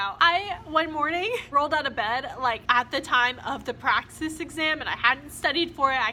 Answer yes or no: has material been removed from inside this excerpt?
no